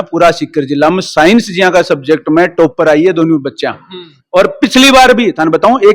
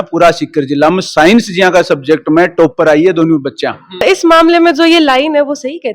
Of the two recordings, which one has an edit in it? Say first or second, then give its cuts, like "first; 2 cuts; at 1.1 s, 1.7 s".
second; 1 cut; at 4.0 s